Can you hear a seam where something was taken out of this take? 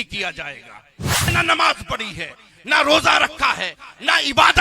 yes; 1 cut; at 1.3 s

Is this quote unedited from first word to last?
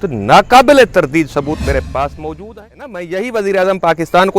no; 1 cut; at 2.9 s

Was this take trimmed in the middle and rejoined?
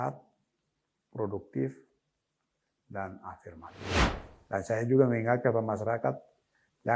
yes; 1 cut; at 4.1 s

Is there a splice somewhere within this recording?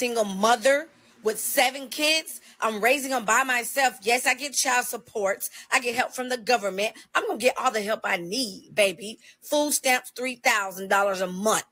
no; 0 cuts

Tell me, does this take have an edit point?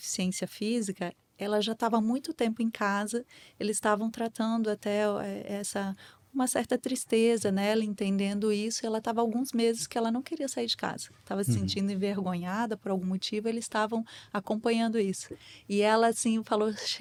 no; 0 cuts

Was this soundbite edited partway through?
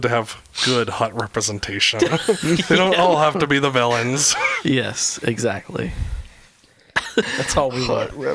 no; 0 cuts

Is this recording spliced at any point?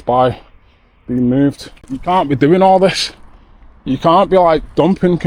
yes; 1 cut; at 1.9 s

